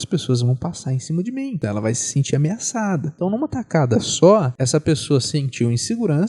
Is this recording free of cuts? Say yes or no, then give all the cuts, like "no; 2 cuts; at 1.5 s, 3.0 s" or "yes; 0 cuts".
no; 3 cuts; at 1.6 s, 3.1 s, 4.6 s